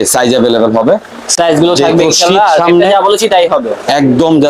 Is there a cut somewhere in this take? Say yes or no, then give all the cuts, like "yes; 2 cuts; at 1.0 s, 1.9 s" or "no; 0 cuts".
no; 0 cuts